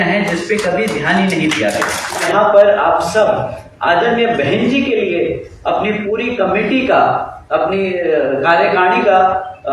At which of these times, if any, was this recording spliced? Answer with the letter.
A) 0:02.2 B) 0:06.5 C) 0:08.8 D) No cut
A